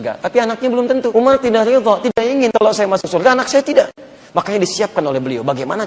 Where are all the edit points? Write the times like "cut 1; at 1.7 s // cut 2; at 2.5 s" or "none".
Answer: cut 1; at 1.1 s